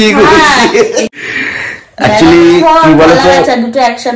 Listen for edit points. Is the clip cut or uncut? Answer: cut